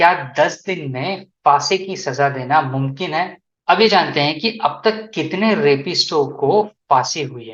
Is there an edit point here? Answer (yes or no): yes